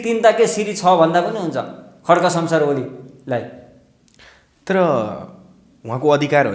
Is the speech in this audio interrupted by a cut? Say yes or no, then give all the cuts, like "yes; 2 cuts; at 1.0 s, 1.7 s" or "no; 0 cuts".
no; 0 cuts